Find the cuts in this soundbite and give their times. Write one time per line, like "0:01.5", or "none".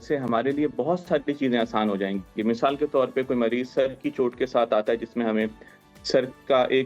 none